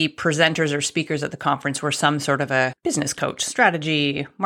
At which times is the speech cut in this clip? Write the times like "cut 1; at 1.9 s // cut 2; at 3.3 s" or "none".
cut 1; at 2.8 s